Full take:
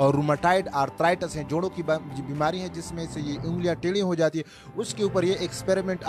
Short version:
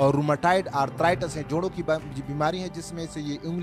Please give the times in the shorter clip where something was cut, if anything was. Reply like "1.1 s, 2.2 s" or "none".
none